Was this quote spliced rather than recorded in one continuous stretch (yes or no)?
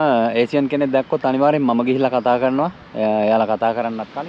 no